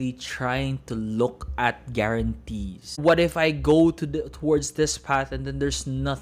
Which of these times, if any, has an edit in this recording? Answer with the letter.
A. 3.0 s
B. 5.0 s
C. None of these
A